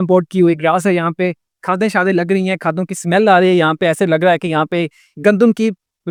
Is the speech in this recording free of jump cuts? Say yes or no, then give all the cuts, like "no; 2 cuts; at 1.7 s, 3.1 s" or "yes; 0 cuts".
yes; 0 cuts